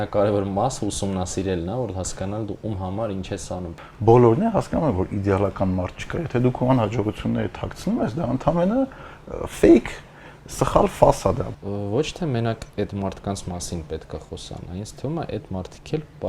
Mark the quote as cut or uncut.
cut